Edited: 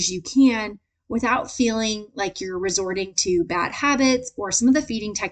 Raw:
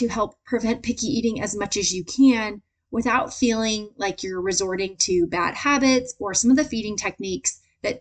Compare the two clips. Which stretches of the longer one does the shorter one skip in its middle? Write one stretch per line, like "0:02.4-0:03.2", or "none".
none

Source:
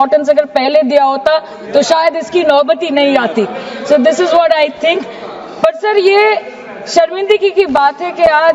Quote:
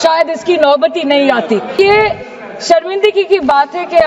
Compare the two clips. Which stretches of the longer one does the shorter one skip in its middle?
0:03.6-0:06.0

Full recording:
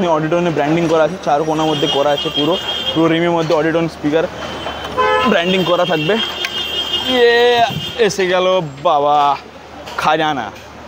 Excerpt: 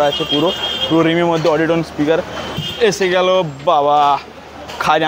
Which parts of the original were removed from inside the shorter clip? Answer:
0:04.7-0:07.8

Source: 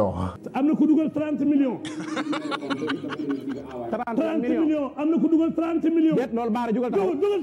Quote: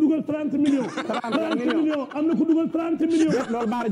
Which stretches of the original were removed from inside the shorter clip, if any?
0:01.9-0:03.8

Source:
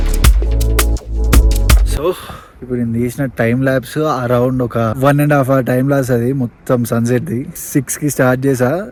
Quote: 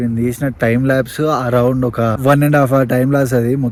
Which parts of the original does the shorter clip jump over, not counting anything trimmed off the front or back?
none

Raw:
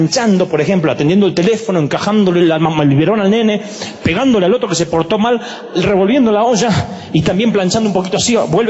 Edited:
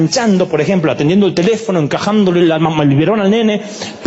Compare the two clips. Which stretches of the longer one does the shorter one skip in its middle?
none

